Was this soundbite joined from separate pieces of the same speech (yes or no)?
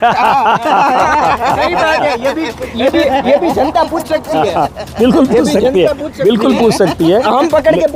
no